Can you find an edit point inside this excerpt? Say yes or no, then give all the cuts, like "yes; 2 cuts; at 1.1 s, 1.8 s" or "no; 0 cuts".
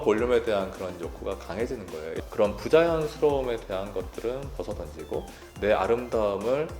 no; 0 cuts